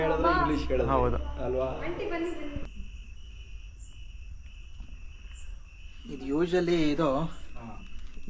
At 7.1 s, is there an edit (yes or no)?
no